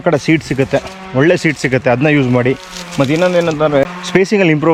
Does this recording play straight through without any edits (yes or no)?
no